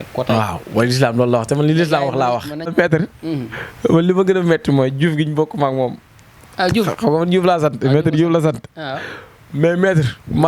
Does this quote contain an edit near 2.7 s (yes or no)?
yes